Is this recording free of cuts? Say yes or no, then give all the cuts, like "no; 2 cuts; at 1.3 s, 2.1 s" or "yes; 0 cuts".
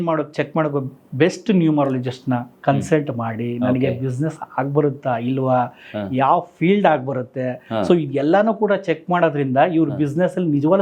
yes; 0 cuts